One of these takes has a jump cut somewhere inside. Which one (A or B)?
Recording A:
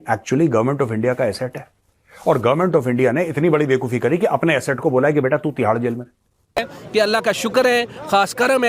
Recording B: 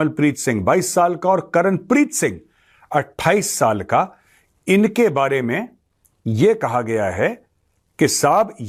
A